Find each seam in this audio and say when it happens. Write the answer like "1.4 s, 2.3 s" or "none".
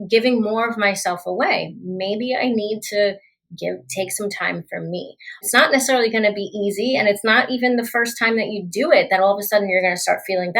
5.4 s